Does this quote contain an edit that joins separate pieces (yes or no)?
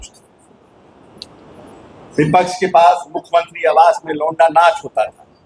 no